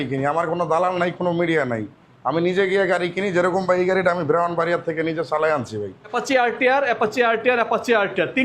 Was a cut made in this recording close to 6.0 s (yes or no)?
yes